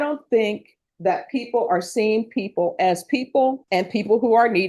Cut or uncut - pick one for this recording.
cut